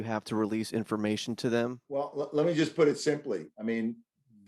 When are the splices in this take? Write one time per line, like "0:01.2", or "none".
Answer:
0:01.8

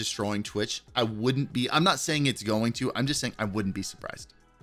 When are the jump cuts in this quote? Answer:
none

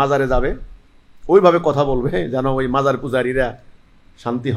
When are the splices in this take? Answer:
none

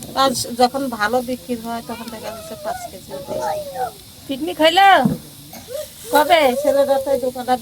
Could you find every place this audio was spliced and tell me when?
none

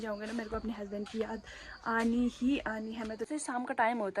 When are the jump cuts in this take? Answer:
0:03.2

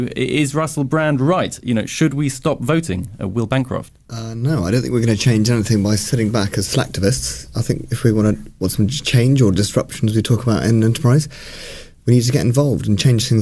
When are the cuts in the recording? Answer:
none

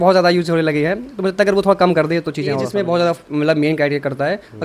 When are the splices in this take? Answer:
0:02.6

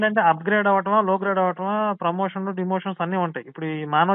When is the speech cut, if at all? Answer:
none

